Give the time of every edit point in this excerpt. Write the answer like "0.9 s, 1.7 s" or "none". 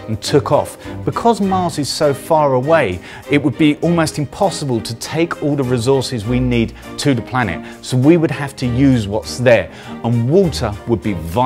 5.6 s